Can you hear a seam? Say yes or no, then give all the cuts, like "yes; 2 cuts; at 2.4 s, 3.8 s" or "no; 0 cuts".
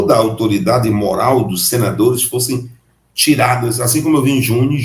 no; 0 cuts